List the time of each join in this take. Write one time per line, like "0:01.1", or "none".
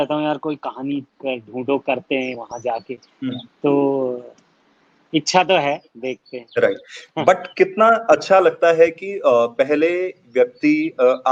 none